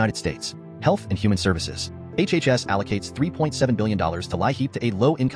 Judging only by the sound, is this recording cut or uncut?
uncut